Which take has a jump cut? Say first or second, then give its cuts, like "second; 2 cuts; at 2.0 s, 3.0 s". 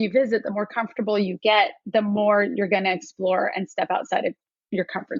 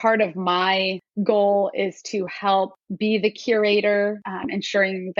second; 3 cuts; at 1.0 s, 2.8 s, 4.3 s